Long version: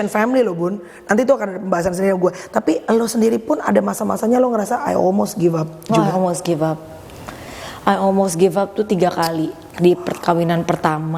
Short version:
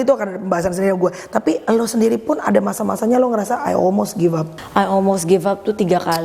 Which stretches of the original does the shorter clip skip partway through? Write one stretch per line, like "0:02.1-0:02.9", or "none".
0:05.7-0:07.6